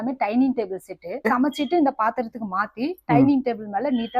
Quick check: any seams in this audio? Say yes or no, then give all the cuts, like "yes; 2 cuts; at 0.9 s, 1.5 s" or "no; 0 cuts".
yes; 1 cut; at 1.3 s